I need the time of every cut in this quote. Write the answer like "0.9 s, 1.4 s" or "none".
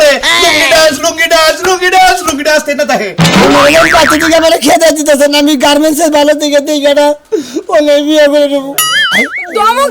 3.2 s, 8.9 s